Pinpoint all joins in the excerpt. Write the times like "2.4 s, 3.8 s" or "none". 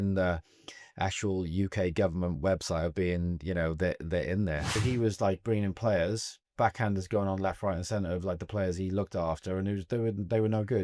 4.7 s